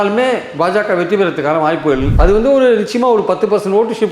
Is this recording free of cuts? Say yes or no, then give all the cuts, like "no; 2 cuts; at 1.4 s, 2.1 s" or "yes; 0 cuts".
no; 1 cut; at 2.1 s